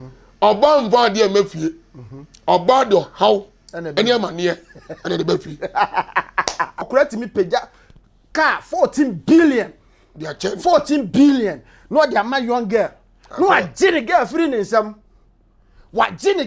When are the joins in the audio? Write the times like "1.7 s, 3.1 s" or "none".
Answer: 6.9 s